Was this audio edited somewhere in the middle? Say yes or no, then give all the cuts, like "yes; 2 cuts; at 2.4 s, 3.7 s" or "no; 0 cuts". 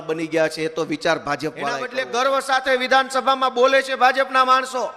yes; 1 cut; at 2.0 s